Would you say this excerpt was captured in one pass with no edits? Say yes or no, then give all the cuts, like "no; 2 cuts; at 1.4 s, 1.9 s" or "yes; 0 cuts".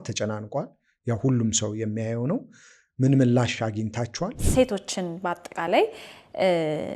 no; 1 cut; at 4.4 s